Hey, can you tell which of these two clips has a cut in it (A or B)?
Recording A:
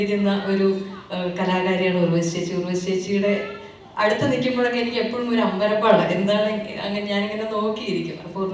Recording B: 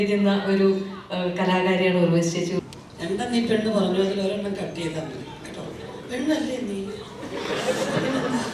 B